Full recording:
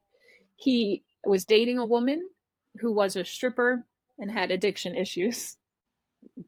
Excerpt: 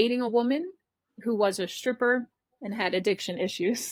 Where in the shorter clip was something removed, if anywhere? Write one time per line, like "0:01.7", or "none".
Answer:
none